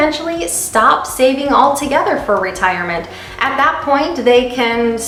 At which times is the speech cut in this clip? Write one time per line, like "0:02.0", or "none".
none